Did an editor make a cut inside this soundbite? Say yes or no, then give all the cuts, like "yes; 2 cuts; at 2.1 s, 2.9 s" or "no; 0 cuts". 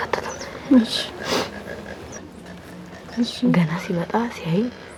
no; 0 cuts